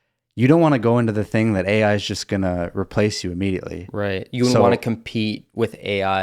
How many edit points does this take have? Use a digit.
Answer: 0